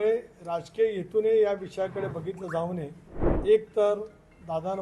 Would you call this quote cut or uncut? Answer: cut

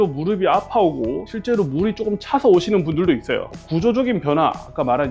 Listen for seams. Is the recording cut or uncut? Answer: cut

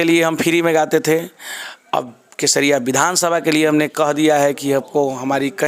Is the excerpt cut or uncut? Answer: uncut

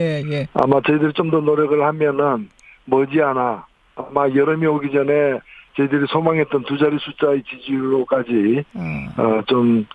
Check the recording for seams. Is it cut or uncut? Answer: cut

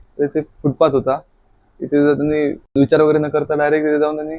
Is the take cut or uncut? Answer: cut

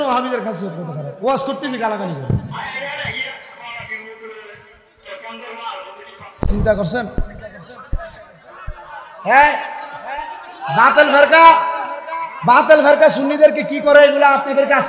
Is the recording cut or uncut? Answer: uncut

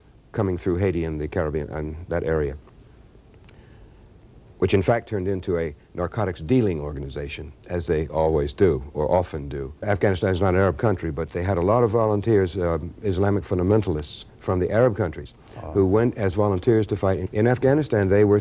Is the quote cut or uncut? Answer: cut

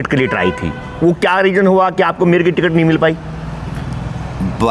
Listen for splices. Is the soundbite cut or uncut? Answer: uncut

